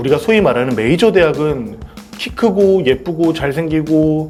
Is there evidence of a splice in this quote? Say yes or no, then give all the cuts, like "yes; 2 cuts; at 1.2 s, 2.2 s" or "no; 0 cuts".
no; 0 cuts